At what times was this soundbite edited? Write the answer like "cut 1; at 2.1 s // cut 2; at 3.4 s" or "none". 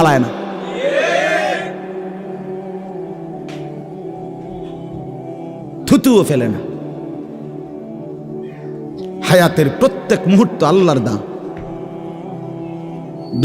none